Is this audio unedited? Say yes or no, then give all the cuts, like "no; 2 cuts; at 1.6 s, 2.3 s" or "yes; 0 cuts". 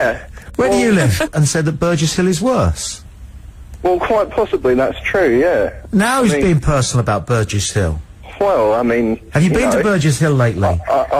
yes; 0 cuts